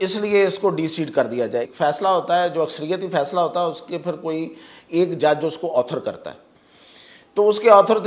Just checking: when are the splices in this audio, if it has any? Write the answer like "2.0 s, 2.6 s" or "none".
1.7 s